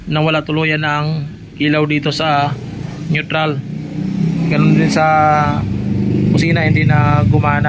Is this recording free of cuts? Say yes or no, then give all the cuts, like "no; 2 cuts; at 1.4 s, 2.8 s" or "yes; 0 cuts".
yes; 0 cuts